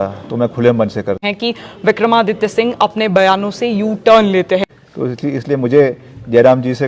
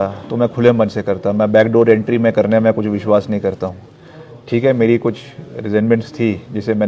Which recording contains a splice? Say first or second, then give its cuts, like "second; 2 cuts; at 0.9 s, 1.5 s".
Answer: first; 2 cuts; at 1.2 s, 4.6 s